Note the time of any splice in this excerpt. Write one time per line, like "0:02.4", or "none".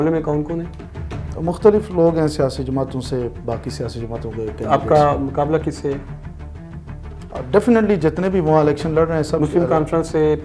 none